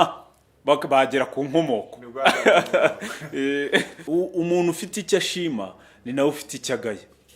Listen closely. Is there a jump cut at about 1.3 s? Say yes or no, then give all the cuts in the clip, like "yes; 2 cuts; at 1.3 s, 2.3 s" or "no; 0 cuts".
no; 1 cut; at 4.0 s